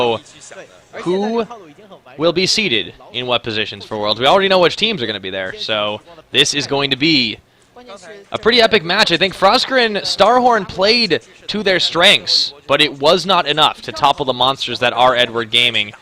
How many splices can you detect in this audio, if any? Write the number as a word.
zero